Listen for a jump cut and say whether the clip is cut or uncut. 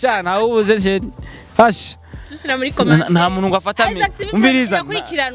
uncut